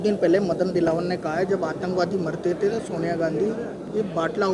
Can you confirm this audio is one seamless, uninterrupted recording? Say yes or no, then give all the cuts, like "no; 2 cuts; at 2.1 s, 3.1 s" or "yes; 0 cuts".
yes; 0 cuts